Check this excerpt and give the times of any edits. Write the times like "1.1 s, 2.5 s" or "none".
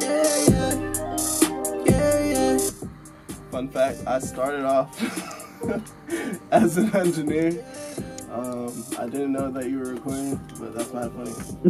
none